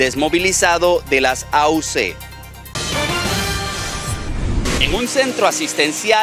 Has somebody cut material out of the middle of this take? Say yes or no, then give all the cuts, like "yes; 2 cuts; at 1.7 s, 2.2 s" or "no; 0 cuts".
yes; 1 cut; at 2.6 s